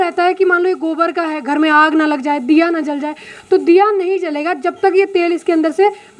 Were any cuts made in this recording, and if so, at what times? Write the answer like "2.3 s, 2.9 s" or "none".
none